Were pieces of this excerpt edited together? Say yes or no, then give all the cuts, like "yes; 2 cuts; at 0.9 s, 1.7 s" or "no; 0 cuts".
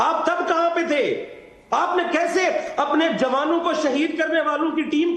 no; 0 cuts